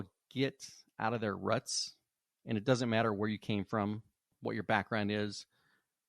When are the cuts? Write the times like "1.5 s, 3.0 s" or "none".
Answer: 4.2 s